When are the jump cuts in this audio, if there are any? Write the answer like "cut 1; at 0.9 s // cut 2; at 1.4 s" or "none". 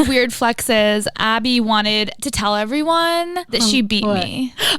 cut 1; at 1.1 s // cut 2; at 2.2 s // cut 3; at 3.4 s